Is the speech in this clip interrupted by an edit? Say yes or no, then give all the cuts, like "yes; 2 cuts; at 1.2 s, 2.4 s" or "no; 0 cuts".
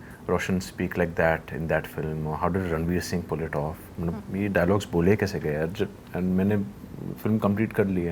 no; 0 cuts